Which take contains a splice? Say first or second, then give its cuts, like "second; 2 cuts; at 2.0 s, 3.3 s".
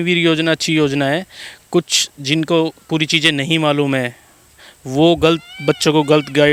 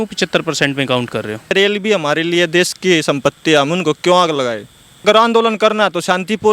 second; 2 cuts; at 1.5 s, 5.0 s